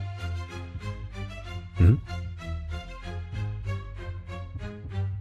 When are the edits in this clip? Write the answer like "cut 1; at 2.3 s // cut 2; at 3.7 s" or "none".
cut 1; at 2.4 s